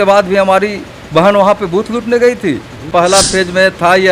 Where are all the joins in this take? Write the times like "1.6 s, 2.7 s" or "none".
2.9 s